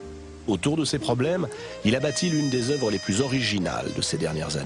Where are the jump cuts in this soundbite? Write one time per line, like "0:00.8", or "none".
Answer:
0:01.3